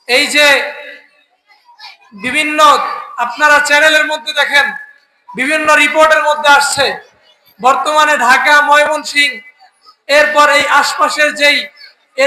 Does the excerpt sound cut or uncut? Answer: uncut